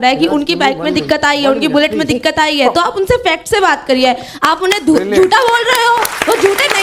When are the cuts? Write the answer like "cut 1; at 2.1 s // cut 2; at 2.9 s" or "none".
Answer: none

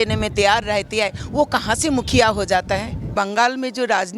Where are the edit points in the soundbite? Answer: cut 1; at 3.1 s

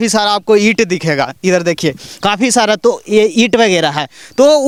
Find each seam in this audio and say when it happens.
none

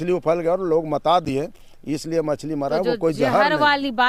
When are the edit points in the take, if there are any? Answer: none

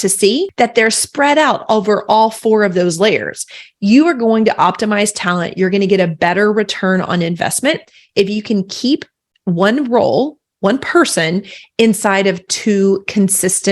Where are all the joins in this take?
none

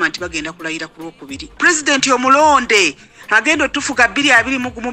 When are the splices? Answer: cut 1; at 1.6 s

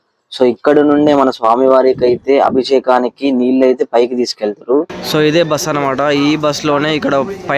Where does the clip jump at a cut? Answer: cut 1; at 4.9 s

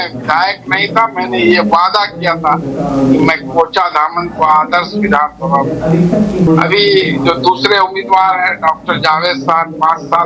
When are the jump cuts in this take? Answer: cut 1; at 6.5 s

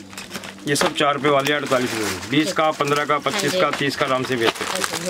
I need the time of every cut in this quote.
none

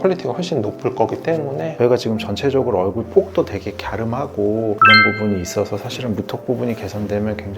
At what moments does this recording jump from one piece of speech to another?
cut 1; at 1.7 s

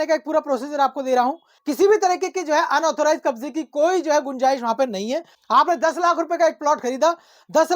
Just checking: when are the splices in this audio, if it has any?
cut 1; at 1.5 s // cut 2; at 5.3 s

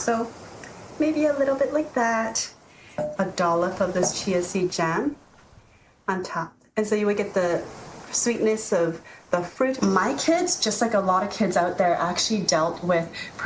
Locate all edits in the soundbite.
cut 1; at 3.1 s // cut 2; at 9.7 s

